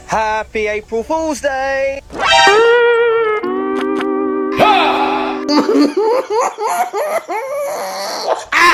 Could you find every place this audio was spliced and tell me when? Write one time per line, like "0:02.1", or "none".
none